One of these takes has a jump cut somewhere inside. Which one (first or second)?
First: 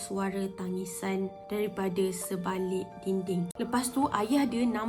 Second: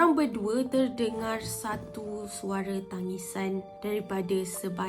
first